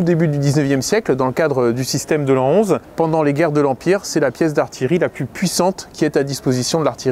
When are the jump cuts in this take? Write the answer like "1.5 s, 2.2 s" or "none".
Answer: none